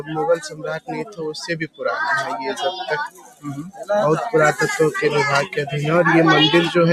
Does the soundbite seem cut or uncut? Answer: uncut